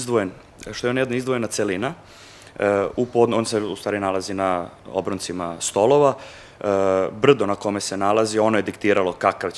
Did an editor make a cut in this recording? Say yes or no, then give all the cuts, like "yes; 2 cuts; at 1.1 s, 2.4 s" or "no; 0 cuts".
no; 0 cuts